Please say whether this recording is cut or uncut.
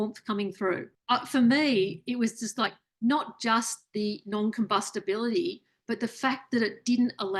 cut